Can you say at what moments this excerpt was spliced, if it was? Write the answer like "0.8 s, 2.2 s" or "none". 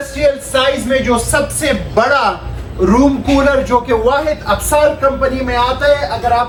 none